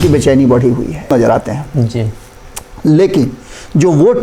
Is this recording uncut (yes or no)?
no